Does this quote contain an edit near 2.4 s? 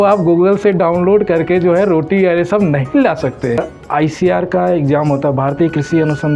no; 1 cut; at 3.6 s

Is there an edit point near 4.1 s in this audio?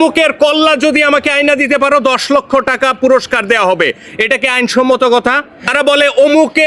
no; 1 cut; at 5.6 s

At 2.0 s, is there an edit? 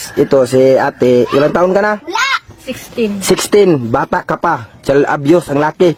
no; 0 cuts

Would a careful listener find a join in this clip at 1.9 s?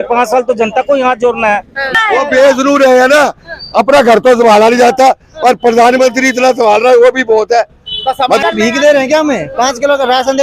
yes; 2 cuts; at 1.9 s, 8.4 s

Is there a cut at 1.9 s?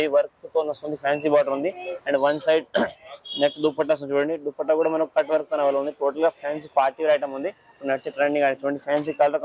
no; 0 cuts

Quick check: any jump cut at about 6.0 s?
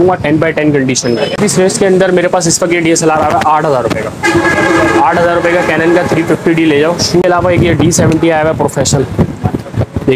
no; 2 cuts; at 1.4 s, 7.2 s

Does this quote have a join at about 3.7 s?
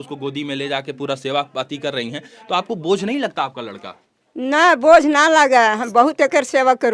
no; 0 cuts

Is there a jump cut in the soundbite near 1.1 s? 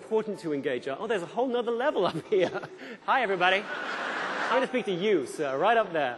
no; 2 cuts; at 2.9 s, 4.4 s

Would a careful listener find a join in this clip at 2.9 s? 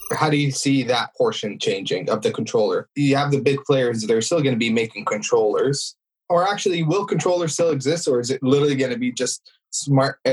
yes; 2 cuts; at 1.1 s, 2.9 s

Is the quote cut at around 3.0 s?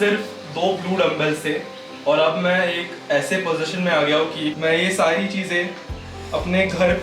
no; 1 cut; at 4.6 s

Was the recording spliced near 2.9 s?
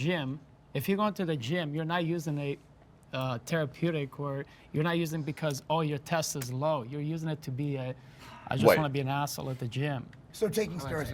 no; 1 cut; at 10.2 s

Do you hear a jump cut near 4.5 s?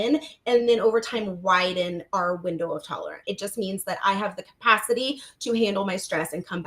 no; 1 cut; at 3.2 s

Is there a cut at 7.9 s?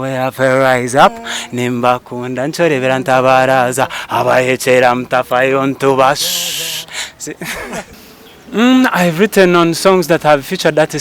yes; 1 cut; at 7.9 s

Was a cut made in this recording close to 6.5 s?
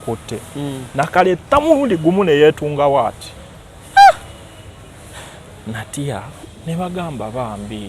yes; 1 cut; at 6.5 s

